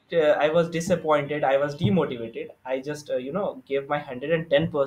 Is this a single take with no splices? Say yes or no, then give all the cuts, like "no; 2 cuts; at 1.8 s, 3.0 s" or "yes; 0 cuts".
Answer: yes; 0 cuts